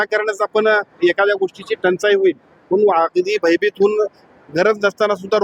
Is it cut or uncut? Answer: uncut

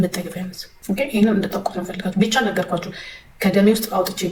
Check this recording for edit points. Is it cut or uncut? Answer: uncut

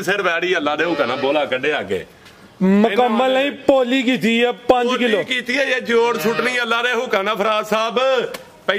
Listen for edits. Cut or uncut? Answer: uncut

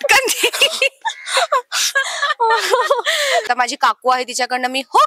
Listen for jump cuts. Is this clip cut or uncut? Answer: cut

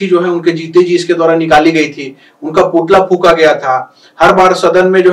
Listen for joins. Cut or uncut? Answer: uncut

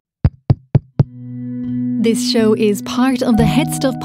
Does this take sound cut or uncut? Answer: cut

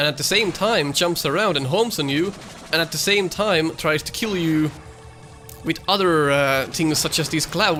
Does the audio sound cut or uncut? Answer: uncut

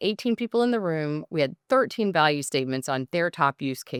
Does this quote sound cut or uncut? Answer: uncut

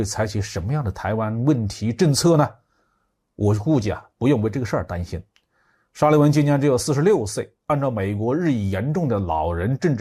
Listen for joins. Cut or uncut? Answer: uncut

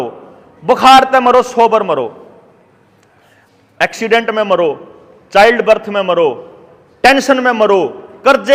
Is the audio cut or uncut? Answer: uncut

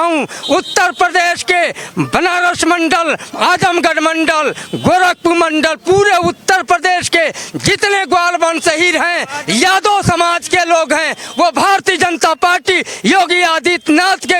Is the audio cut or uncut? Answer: uncut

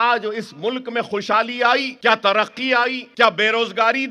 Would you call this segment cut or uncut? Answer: cut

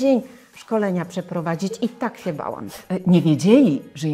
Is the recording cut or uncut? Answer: cut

